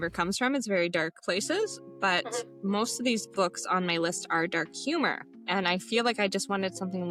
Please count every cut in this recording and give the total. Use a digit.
0